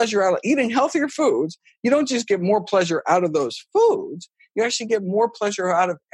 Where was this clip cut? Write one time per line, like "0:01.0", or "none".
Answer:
none